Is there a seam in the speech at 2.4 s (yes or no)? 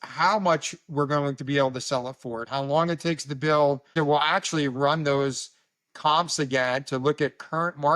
yes